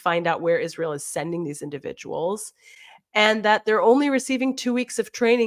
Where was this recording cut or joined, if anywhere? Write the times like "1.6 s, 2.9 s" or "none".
none